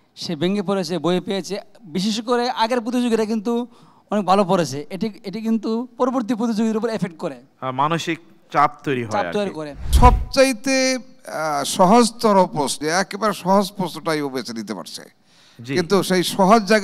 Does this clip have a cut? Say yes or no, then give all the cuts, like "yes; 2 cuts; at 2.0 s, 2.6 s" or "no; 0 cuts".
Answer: yes; 2 cuts; at 9.9 s, 12.8 s